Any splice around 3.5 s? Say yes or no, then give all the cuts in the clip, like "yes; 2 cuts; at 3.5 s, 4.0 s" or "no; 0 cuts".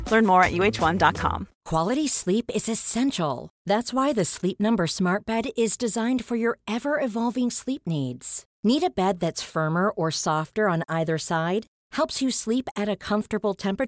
no; 1 cut; at 1.5 s